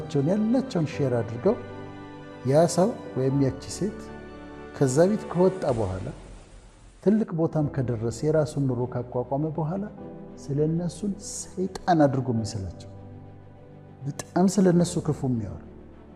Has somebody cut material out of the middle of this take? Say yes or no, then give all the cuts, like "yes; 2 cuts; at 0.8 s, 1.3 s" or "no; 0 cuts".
yes; 2 cuts; at 12.7 s, 14.0 s